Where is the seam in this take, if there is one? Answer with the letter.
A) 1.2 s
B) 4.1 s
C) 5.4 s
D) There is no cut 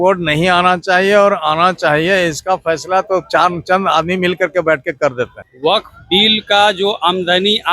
C